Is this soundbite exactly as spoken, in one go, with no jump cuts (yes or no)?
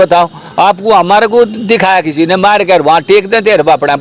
yes